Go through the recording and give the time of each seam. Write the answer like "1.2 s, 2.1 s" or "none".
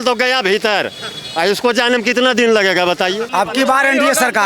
3.3 s